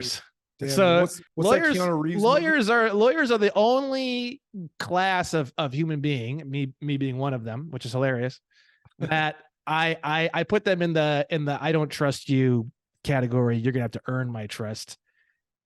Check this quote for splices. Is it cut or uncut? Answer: cut